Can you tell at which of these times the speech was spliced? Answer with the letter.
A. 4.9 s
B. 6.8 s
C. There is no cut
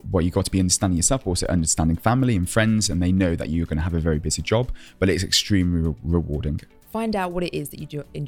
B